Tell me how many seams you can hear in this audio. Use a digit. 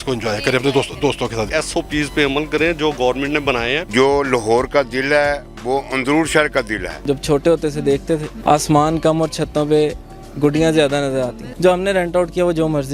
5